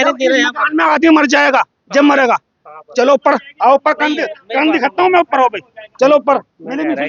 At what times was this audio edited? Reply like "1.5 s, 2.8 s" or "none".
none